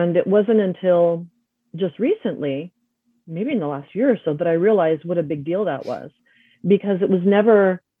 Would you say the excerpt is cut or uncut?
uncut